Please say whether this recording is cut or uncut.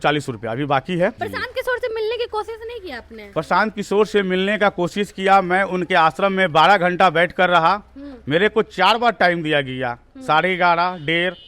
cut